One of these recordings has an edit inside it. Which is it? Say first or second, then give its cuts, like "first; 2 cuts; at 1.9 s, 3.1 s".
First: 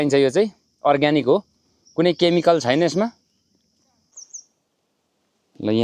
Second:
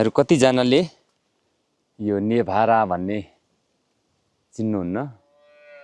first; 1 cut; at 4.1 s